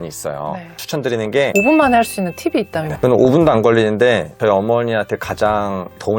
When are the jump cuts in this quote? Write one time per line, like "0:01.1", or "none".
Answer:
0:01.5
0:02.8